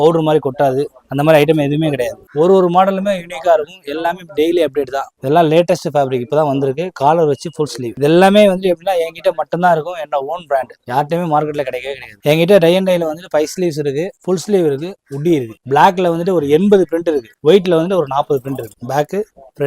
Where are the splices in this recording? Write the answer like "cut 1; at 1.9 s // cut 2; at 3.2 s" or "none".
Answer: cut 1; at 2.2 s // cut 2; at 5.1 s // cut 3; at 7.9 s // cut 4; at 12.2 s // cut 5; at 15.5 s // cut 6; at 18.8 s